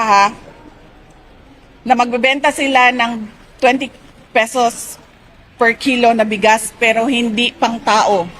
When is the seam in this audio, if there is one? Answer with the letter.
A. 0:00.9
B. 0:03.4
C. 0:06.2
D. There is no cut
D